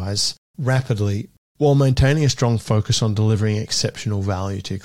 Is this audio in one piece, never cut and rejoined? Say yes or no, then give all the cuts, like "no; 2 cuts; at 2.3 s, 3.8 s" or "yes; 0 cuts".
no; 1 cut; at 1.4 s